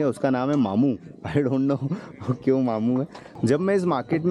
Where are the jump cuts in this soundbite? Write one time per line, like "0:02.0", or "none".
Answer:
0:03.2